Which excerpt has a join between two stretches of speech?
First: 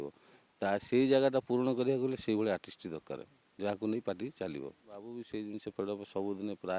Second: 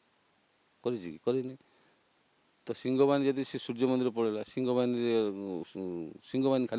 first; 1 cut; at 5.1 s

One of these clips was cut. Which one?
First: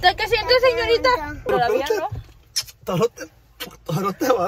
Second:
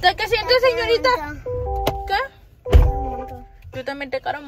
first; 1 cut; at 1.5 s

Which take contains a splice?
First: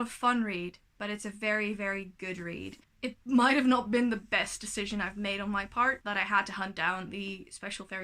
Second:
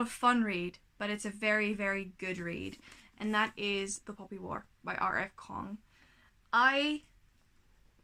first; 2 cuts; at 2.8 s, 6.0 s

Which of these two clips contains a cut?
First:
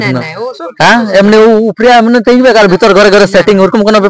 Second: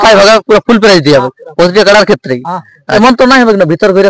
second; 1 cut; at 3.0 s

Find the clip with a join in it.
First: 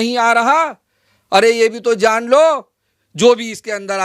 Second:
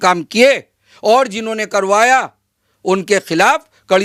first; 1 cut; at 2.9 s

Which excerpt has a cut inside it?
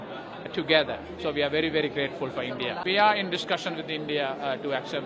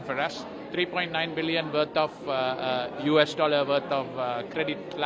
first; 1 cut; at 2.8 s

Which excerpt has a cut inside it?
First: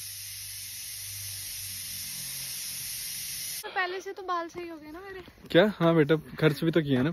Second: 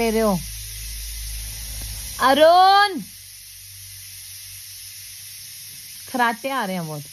first; 1 cut; at 3.7 s

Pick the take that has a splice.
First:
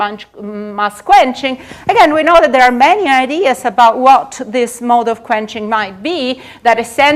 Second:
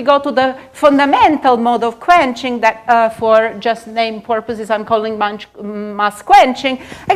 second; 1 cut; at 4.1 s

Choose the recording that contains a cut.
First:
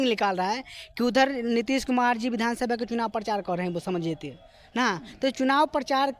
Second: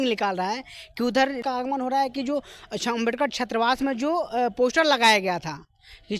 second; 1 cut; at 1.4 s

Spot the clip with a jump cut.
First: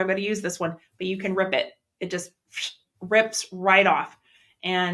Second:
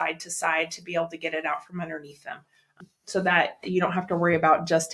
second; 1 cut; at 2.8 s

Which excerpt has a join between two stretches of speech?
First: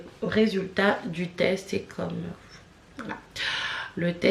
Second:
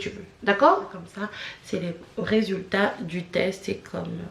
second; 1 cut; at 1.0 s

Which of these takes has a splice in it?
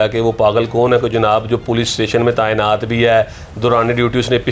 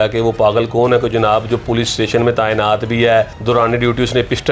second; 1 cut; at 3.4 s

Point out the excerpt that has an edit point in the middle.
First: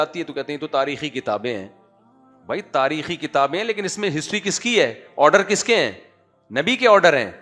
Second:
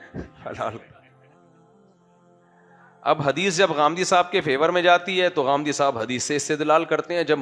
second; 2 cuts; at 1.0 s, 2.7 s

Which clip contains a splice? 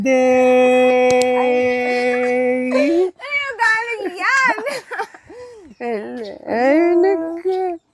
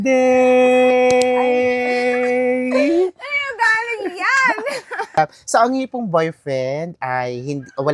second; 1 cut; at 5.2 s

